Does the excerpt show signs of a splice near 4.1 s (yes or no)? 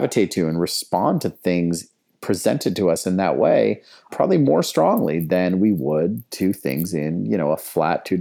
yes